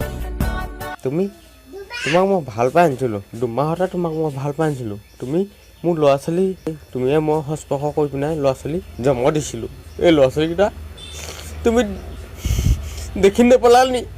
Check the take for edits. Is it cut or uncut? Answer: cut